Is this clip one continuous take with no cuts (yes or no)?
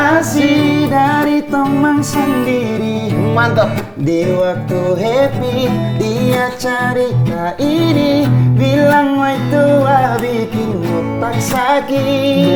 yes